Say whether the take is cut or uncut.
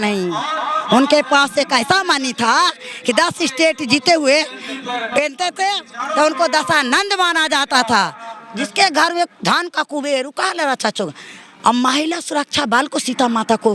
uncut